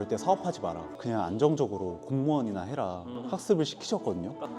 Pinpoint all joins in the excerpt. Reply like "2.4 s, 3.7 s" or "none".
3.1 s